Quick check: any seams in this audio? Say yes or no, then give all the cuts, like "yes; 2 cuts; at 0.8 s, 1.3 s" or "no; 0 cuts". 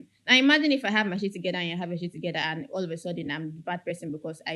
no; 0 cuts